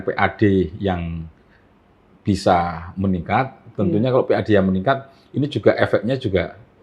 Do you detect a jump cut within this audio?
no; 0 cuts

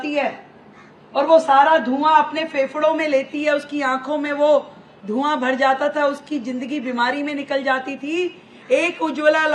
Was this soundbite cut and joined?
no; 0 cuts

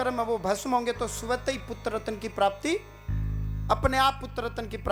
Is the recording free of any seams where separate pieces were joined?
yes; 0 cuts

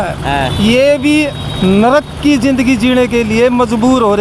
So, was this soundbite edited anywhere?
no; 0 cuts

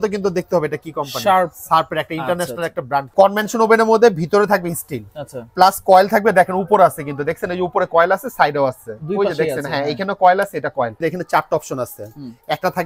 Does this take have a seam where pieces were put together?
yes; 2 cuts; at 3.1 s, 11.0 s

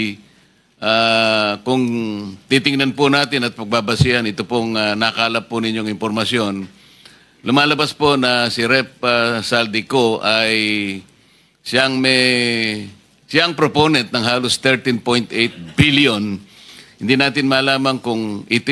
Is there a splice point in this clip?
no; 0 cuts

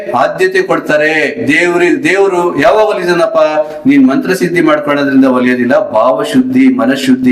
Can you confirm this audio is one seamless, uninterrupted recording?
yes; 0 cuts

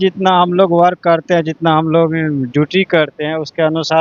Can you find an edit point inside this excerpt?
no; 0 cuts

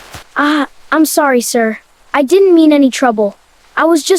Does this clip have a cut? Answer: no; 0 cuts

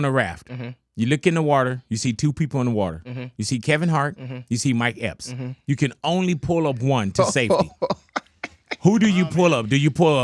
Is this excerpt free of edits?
yes; 0 cuts

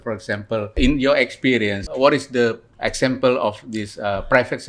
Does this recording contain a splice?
yes; 3 cuts; at 0.7 s, 1.8 s, 2.7 s

